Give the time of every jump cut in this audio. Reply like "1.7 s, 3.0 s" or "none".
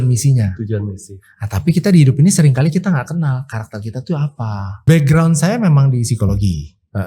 4.9 s